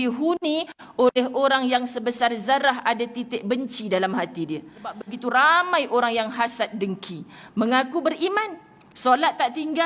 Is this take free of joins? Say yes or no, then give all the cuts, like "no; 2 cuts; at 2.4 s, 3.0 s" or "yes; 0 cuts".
no; 1 cut; at 5.1 s